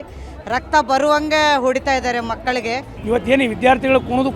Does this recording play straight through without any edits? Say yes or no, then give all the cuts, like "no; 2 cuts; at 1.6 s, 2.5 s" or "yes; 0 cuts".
no; 1 cut; at 2.9 s